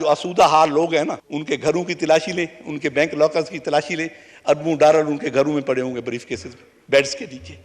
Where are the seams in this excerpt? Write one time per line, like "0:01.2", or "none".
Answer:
0:01.3